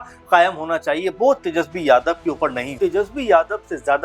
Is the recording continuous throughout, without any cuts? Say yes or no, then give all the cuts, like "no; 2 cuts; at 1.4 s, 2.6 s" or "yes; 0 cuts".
no; 1 cut; at 2.6 s